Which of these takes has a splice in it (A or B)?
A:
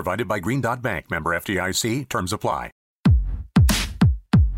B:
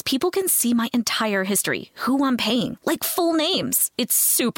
A